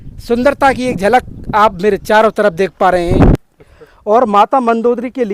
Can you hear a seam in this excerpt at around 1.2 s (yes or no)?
no